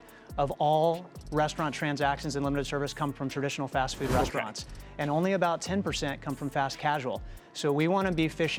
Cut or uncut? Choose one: uncut